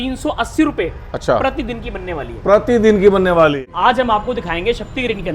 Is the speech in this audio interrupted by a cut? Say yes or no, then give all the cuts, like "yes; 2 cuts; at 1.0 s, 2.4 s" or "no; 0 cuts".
yes; 1 cut; at 3.6 s